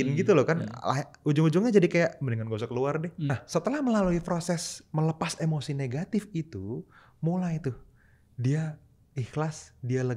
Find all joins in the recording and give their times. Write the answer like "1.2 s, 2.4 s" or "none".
3.3 s